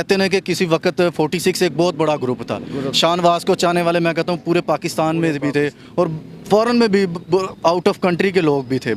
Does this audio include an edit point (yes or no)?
no